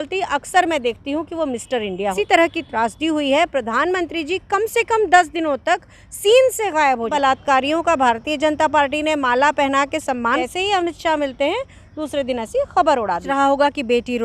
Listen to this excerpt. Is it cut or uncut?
cut